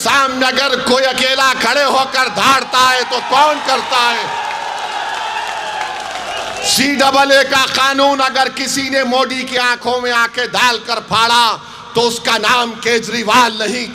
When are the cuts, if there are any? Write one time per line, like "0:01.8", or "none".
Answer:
none